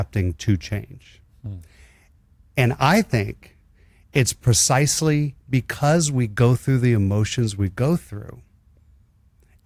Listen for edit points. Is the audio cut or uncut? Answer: uncut